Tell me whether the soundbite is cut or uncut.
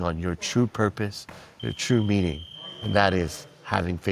uncut